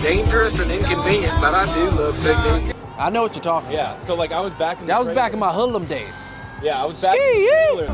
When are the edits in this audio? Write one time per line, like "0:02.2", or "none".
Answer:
none